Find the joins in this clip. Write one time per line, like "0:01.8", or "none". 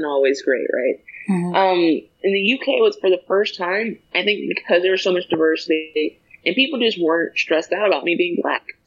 0:02.1